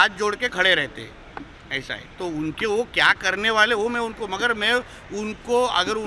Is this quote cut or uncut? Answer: uncut